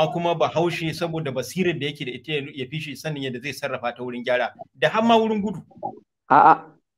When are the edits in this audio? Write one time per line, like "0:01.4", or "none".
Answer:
none